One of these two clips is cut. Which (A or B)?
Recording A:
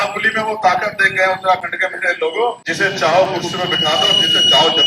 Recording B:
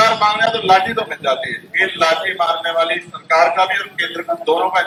A